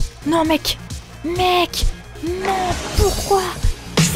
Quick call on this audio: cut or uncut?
uncut